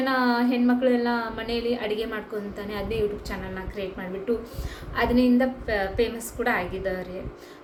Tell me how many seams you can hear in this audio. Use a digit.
0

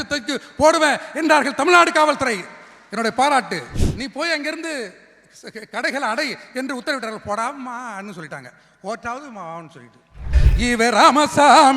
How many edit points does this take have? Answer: 2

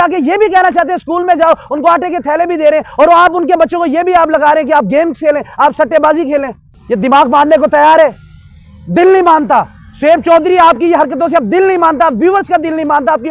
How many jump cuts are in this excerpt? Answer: 1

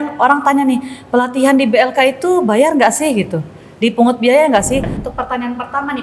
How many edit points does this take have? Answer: 1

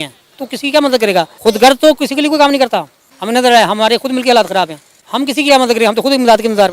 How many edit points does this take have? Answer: 1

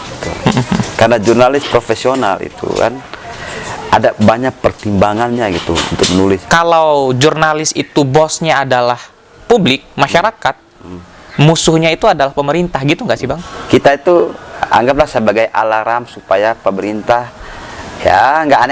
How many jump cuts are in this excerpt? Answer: 2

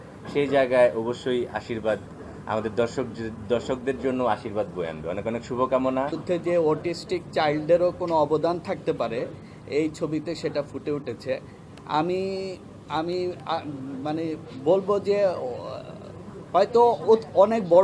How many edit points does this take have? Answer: 1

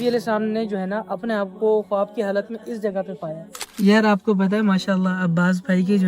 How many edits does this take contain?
1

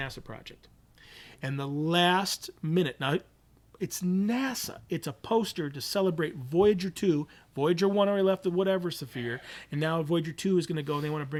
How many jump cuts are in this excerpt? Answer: 0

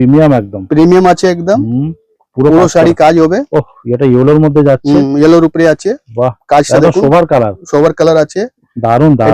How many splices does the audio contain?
0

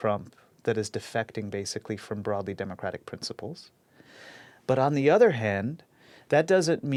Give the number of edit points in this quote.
0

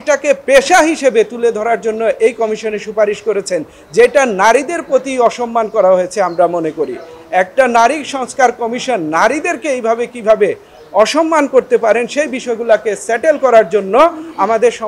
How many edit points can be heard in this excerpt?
0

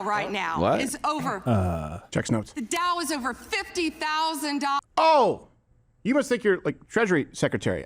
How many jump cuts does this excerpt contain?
1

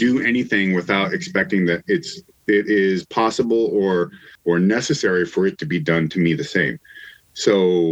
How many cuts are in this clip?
1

